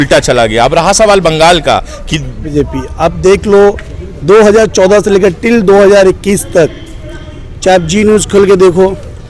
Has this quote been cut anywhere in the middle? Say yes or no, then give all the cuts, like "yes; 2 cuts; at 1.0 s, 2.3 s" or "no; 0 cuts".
yes; 1 cut; at 2.5 s